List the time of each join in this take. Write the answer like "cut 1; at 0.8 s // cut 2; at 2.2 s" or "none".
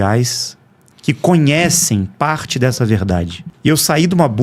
cut 1; at 3.4 s